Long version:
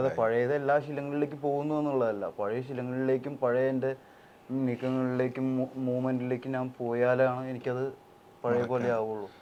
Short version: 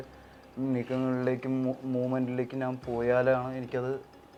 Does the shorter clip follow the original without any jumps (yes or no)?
yes